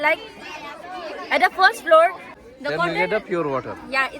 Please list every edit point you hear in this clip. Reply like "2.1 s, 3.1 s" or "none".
2.2 s